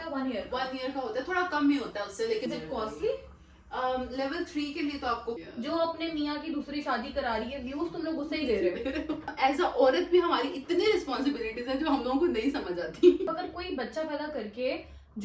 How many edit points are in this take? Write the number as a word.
four